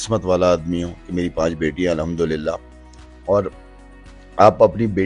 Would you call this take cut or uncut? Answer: uncut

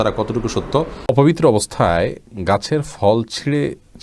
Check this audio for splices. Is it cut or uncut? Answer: cut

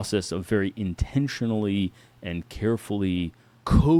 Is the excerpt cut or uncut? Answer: uncut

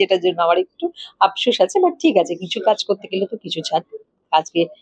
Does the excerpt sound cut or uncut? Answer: uncut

